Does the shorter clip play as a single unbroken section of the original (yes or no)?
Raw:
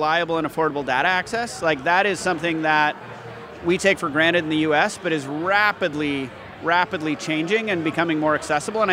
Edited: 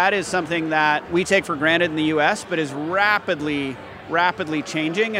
no